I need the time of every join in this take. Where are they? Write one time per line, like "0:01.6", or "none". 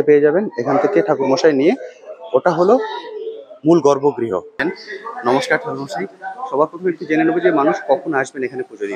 0:04.6